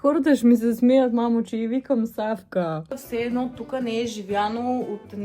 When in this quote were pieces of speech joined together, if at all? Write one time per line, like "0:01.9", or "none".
0:03.0

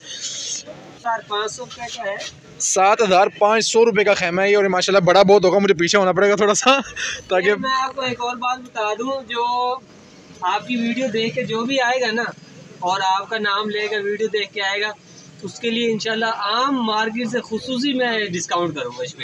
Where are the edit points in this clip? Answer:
0:01.0

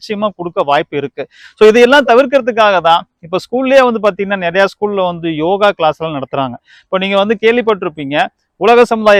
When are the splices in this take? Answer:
none

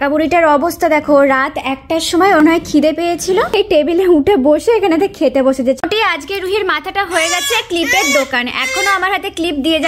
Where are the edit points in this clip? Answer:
0:02.4
0:03.5
0:05.8

